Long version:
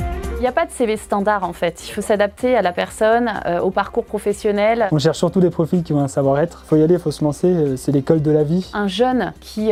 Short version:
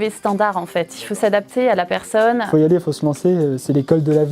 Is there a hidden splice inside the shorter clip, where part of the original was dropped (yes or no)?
yes